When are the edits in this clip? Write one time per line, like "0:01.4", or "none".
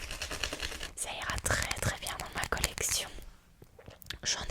0:00.9